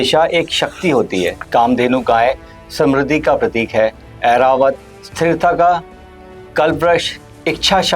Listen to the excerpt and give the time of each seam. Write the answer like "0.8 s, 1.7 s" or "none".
1.4 s